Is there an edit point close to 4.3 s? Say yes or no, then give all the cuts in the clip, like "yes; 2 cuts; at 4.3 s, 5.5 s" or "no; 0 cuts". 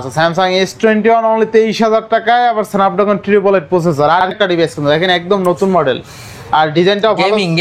yes; 1 cut; at 4.3 s